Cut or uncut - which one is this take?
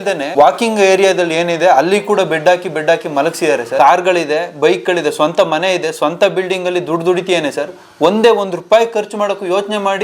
cut